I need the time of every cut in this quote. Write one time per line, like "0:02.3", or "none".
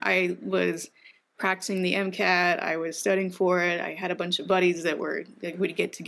none